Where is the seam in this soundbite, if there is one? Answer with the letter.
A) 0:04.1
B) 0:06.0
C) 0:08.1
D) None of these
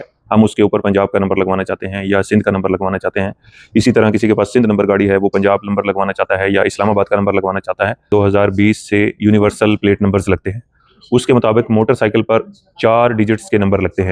C